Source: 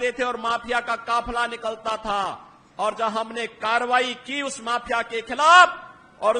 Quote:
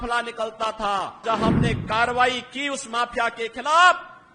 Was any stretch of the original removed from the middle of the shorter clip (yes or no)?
yes